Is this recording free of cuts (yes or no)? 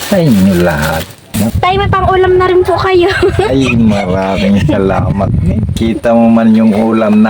no